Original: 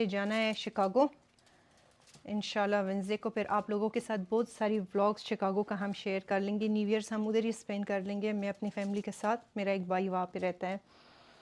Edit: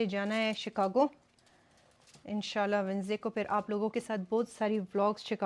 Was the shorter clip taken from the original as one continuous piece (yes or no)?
yes